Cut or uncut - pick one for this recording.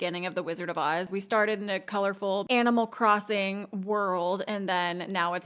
cut